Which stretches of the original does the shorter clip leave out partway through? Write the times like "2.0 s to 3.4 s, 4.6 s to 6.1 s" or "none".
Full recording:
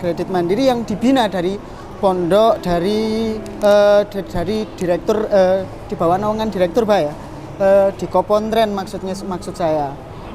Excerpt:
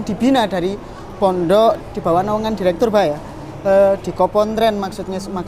2.6 s to 5.8 s